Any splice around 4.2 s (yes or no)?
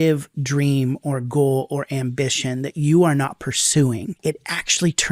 yes